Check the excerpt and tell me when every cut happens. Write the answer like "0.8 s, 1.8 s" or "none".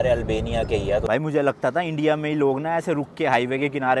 1.1 s